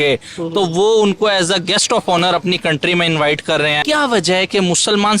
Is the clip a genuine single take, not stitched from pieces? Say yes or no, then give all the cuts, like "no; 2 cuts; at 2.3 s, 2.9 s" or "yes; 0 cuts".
no; 1 cut; at 3.8 s